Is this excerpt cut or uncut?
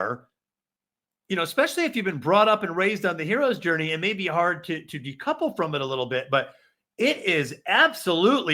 uncut